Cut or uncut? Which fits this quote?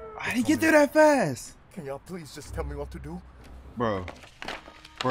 uncut